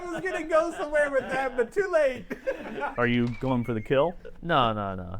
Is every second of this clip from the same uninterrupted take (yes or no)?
no